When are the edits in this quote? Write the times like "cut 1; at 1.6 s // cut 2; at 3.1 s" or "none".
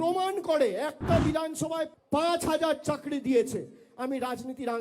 cut 1; at 2.0 s